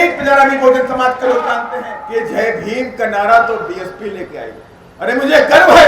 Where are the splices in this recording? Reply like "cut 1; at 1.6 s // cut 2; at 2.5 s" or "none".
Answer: cut 1; at 1.7 s